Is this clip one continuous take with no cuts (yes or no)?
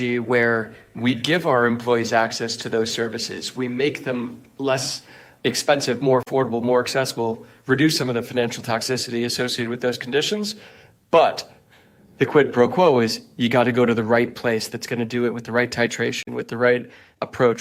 yes